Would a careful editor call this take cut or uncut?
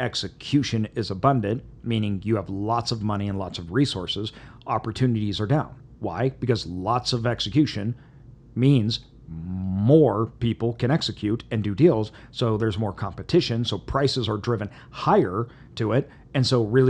uncut